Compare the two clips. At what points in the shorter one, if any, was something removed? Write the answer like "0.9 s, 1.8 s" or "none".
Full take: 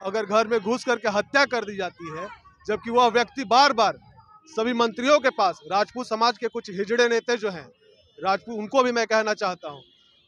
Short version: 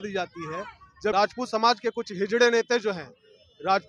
1.1 s

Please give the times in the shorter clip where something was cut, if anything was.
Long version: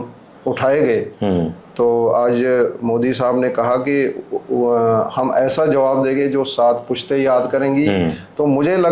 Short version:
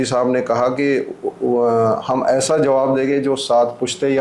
none

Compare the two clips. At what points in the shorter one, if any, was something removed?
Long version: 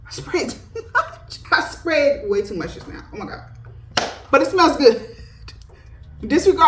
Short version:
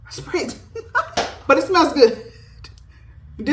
1.2 s

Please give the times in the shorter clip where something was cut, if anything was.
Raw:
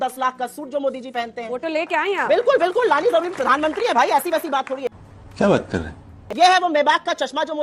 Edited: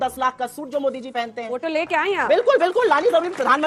none

